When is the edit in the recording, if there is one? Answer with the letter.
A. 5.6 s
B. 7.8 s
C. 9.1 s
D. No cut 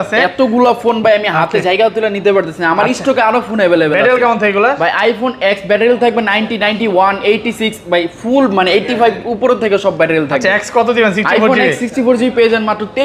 D